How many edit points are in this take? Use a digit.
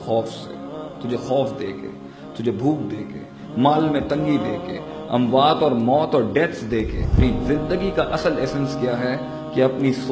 1